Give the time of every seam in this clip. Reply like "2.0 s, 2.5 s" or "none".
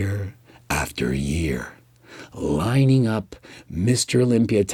none